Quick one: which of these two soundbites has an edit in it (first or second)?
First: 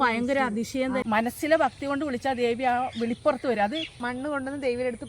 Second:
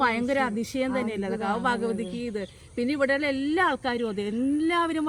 first